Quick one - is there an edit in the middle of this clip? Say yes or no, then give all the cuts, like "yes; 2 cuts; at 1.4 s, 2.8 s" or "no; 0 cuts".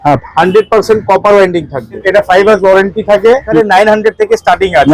yes; 2 cuts; at 2.0 s, 3.5 s